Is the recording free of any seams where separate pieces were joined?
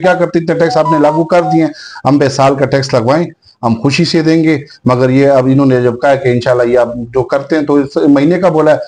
yes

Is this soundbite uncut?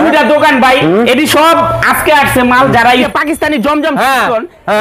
no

